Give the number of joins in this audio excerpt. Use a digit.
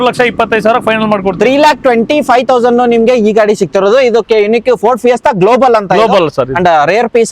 0